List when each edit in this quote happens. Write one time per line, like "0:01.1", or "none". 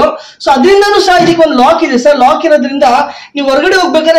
none